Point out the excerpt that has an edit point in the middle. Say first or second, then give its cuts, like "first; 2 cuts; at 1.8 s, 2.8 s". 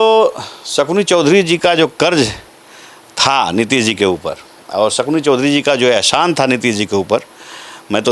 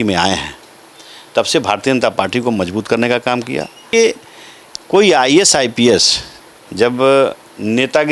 second; 1 cut; at 3.7 s